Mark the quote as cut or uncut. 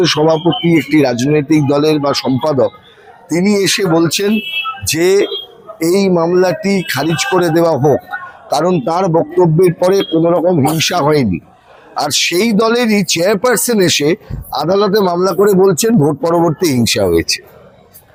uncut